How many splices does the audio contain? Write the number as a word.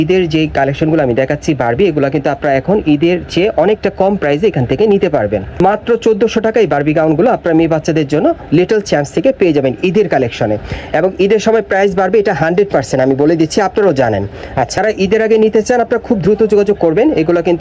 two